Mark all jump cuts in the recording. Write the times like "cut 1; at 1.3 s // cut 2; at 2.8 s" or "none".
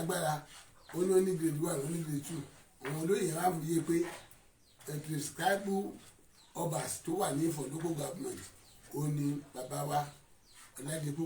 none

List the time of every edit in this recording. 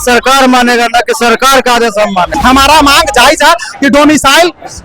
cut 1; at 2.3 s

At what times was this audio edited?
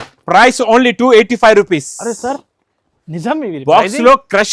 none

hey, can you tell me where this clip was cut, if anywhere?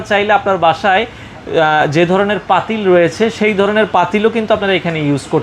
none

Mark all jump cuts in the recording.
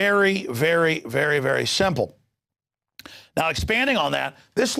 cut 1; at 2.7 s

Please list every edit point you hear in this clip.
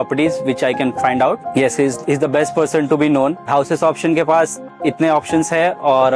cut 1; at 3.5 s

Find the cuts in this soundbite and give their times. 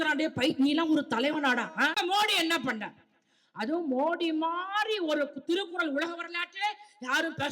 cut 1; at 1.9 s

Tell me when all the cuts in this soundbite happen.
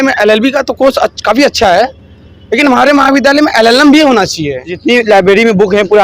cut 1; at 4.7 s

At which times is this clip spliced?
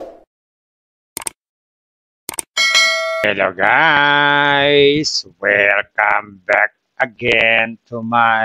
cut 1; at 3.2 s

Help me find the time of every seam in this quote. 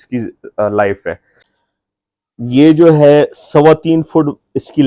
cut 1; at 1.4 s

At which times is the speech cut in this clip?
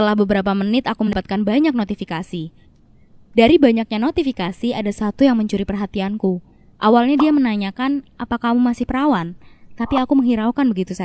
cut 1; at 1.1 s

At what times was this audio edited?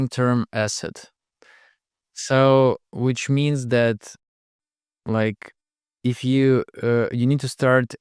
none

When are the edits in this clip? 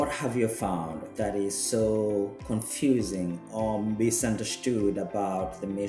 cut 1; at 1.0 s // cut 2; at 2.4 s

